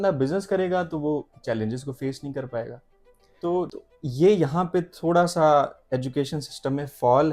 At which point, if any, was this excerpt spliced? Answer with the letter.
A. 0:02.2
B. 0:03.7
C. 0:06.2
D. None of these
B